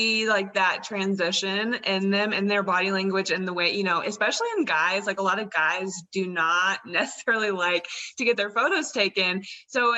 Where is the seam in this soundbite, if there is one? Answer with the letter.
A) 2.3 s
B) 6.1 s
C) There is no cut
C